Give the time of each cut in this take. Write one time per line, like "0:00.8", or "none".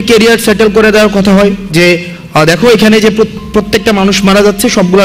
none

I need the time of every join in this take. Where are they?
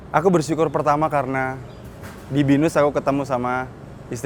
none

